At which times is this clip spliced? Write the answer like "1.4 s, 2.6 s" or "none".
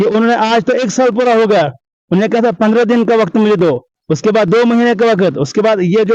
none